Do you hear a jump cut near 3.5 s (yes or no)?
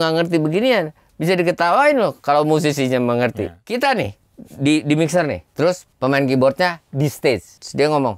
yes